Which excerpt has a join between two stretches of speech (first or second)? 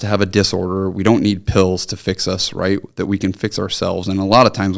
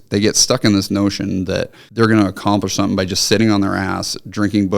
second